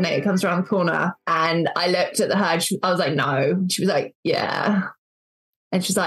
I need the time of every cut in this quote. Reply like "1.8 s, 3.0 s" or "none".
1.2 s